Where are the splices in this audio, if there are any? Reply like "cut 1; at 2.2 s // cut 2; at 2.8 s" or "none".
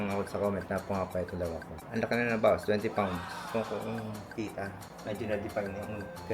cut 1; at 1.7 s // cut 2; at 4.9 s